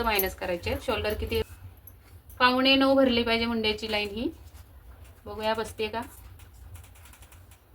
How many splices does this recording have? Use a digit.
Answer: 1